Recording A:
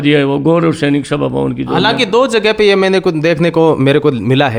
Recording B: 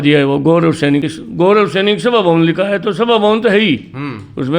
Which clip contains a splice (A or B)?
B